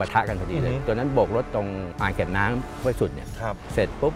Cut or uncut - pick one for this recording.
cut